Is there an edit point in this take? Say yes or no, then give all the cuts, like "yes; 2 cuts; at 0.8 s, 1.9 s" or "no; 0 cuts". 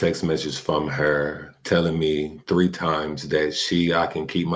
no; 0 cuts